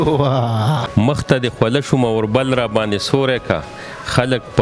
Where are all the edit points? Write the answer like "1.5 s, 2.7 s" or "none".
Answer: 0.9 s